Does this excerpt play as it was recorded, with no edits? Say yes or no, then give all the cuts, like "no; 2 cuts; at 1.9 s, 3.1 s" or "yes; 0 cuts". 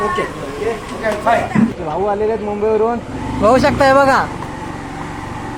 no; 1 cut; at 1.8 s